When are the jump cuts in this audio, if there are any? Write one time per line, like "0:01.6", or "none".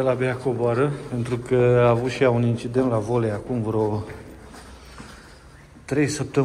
none